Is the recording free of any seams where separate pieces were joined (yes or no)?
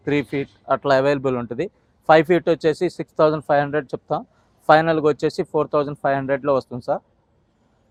yes